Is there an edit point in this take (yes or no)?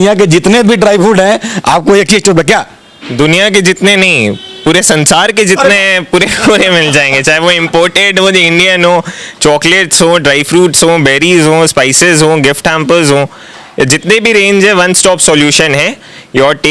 no